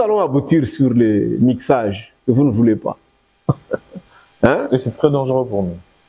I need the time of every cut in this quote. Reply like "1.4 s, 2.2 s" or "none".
none